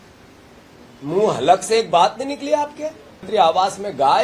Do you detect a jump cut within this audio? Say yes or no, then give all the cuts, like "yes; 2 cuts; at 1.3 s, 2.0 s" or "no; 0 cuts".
yes; 1 cut; at 3.3 s